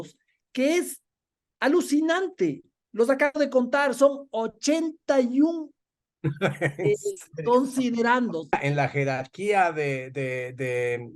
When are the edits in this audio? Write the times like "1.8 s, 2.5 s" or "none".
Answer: 8.5 s